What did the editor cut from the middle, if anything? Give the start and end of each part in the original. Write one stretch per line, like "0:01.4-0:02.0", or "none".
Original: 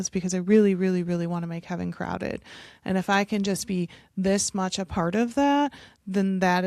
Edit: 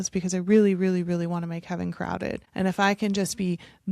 0:02.4-0:02.7